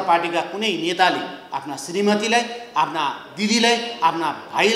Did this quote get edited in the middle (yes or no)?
no